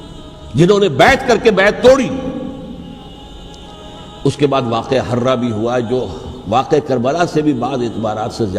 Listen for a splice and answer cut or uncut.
cut